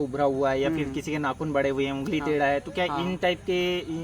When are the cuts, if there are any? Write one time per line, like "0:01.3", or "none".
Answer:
none